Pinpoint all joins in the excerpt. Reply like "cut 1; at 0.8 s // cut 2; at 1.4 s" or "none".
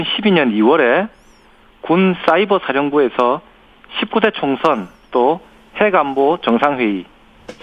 cut 1; at 4.5 s